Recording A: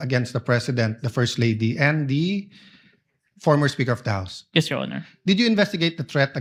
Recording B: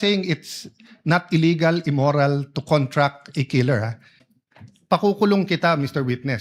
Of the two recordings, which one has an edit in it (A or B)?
B